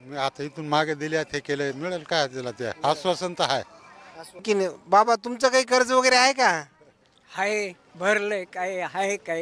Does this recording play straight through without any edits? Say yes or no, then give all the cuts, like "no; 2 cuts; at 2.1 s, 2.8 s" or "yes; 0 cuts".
no; 1 cut; at 4.4 s